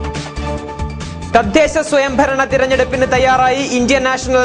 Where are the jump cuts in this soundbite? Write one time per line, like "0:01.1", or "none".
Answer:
0:01.2